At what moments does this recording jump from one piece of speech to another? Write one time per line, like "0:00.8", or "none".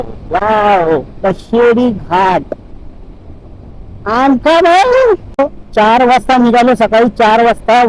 0:05.4